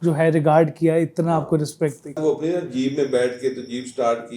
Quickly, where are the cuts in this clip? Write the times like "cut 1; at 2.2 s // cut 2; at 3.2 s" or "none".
cut 1; at 2.2 s